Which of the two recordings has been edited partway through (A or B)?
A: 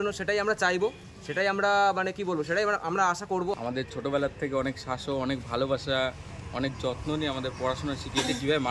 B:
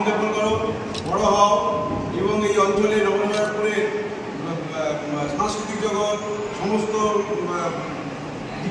A